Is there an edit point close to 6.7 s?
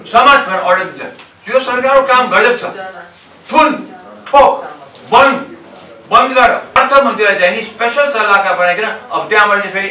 yes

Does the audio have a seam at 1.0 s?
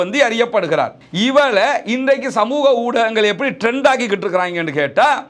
yes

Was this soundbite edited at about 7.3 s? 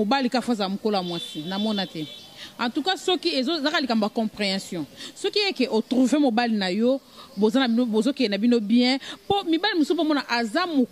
no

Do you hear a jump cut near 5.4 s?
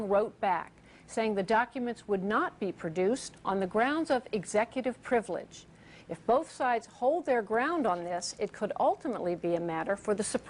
yes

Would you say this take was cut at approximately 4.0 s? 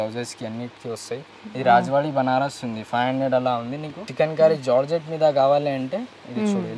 yes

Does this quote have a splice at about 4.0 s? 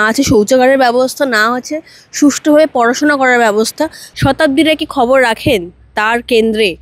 yes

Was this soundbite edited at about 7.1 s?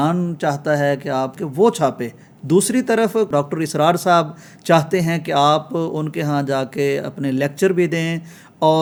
no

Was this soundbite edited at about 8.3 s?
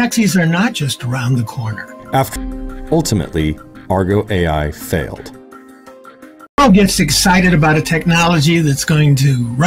no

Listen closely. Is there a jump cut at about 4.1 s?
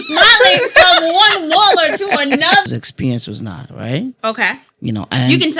no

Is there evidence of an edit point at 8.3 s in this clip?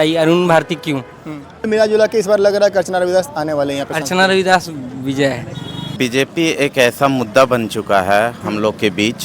no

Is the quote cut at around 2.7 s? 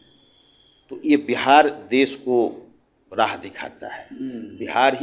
no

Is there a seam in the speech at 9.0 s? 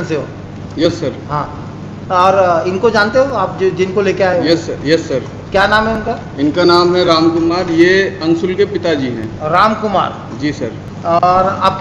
no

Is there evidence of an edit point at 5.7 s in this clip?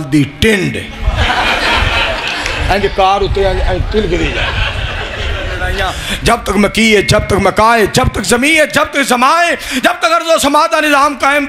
yes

